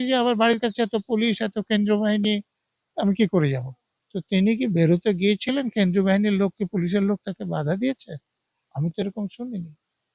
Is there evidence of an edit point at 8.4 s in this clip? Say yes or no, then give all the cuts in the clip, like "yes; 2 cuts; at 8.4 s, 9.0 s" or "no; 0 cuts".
no; 0 cuts